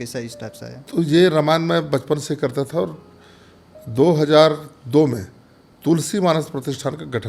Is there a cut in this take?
no; 0 cuts

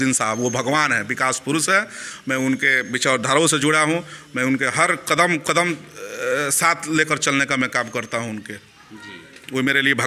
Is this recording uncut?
yes; 0 cuts

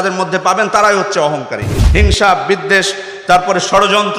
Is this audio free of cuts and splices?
no; 1 cut; at 1.8 s

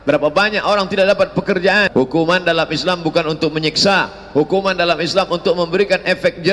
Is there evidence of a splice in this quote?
yes; 1 cut; at 1.9 s

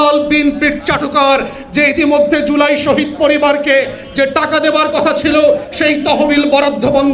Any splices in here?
no; 0 cuts

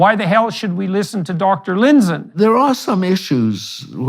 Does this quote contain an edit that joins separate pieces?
yes; 1 cut; at 2.3 s

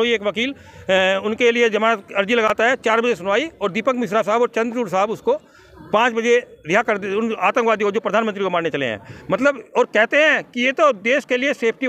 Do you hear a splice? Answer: no; 0 cuts

